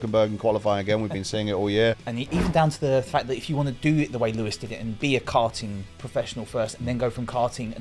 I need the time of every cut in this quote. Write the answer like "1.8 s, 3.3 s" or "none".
1.9 s